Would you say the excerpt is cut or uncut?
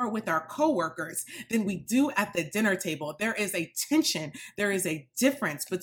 uncut